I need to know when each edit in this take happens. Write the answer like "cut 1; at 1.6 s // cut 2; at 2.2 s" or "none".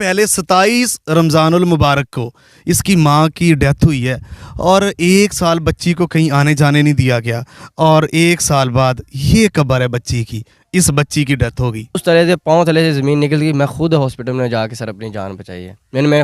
cut 1; at 12.0 s